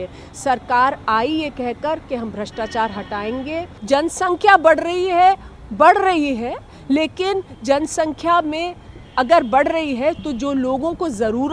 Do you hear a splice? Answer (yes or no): yes